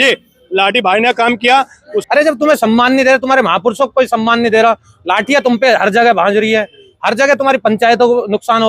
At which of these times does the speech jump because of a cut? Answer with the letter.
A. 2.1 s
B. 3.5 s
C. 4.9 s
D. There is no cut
A